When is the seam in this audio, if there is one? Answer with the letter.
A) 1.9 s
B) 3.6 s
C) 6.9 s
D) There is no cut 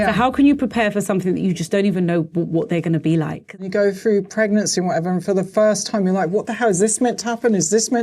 B